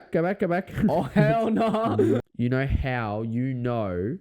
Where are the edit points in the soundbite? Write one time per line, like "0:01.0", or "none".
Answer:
0:02.2